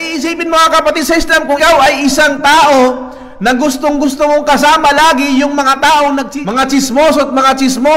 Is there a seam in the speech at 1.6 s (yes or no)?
yes